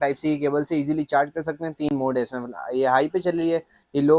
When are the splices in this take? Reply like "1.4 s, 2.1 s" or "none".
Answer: none